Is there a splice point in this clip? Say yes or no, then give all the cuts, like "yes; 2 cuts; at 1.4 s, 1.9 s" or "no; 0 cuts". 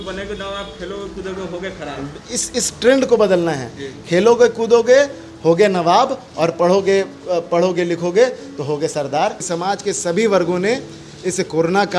yes; 1 cut; at 9.4 s